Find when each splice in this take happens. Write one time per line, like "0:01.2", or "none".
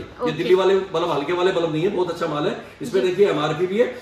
none